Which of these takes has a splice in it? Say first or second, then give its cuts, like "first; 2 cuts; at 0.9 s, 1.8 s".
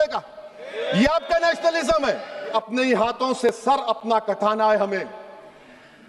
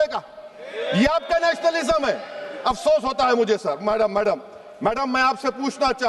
first; 1 cut; at 2.5 s